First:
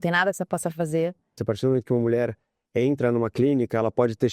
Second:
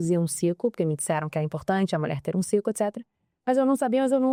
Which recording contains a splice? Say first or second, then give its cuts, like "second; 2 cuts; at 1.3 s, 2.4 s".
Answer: first; 1 cut; at 1.4 s